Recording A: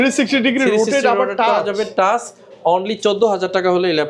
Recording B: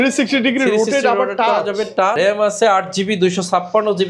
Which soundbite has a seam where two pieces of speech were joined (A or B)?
B